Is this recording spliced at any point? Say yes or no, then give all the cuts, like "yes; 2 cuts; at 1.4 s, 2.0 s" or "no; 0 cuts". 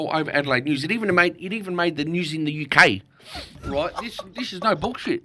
no; 0 cuts